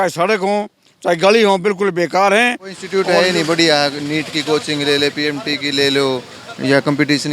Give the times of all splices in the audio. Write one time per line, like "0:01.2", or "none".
0:02.8